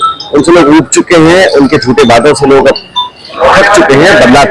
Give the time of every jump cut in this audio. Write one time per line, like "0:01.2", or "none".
none